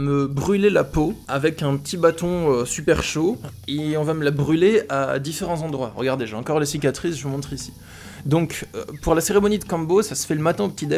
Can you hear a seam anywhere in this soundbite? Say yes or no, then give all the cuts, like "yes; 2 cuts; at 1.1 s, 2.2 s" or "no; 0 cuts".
no; 0 cuts